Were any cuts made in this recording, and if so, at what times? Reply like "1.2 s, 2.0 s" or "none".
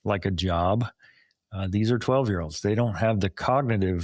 none